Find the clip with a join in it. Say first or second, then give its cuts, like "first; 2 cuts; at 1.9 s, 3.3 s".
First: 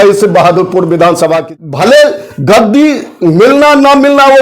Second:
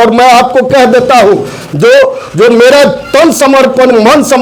first; 1 cut; at 1.5 s